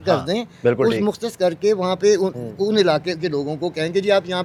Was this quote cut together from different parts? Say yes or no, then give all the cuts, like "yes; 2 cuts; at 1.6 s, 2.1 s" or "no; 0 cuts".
no; 0 cuts